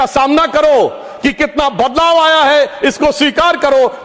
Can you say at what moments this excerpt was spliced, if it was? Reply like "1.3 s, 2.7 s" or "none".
none